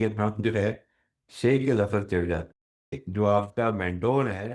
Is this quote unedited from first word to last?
no; 1 cut; at 3.0 s

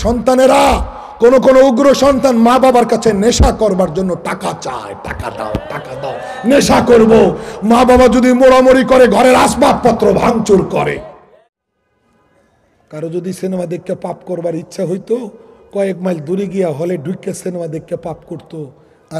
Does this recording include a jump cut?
yes; 1 cut; at 11.2 s

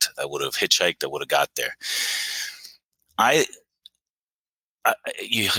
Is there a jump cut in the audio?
no; 0 cuts

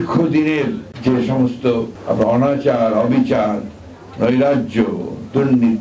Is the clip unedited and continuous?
no; 2 cuts; at 0.9 s, 1.9 s

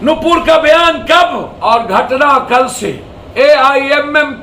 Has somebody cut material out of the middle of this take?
yes; 2 cuts; at 1.5 s, 3.2 s

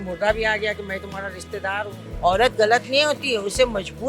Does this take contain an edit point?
yes; 1 cut; at 2.0 s

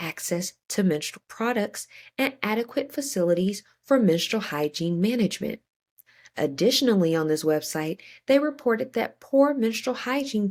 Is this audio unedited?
yes; 0 cuts

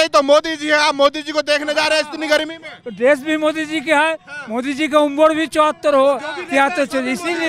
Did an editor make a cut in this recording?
no; 0 cuts

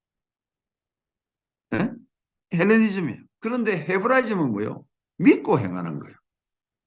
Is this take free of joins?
no; 1 cut; at 3.3 s

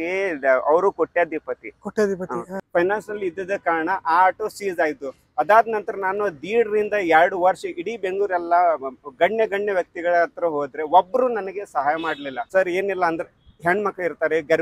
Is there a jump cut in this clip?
yes; 2 cuts; at 2.6 s, 12.4 s

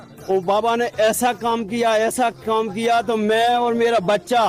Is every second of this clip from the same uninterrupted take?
yes; 0 cuts

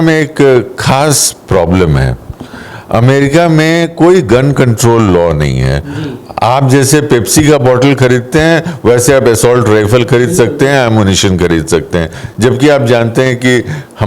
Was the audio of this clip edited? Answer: no; 0 cuts

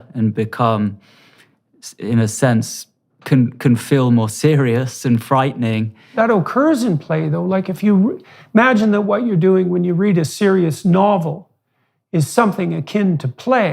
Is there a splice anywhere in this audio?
yes; 1 cut; at 6.1 s

